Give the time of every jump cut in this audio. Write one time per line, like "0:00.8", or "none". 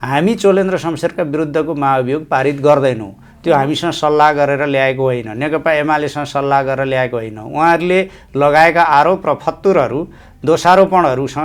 none